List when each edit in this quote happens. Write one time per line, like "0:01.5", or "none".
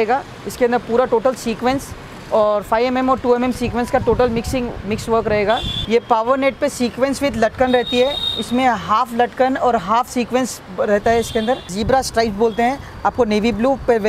0:05.8
0:11.7